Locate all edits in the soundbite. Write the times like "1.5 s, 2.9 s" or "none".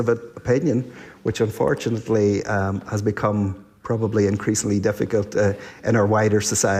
none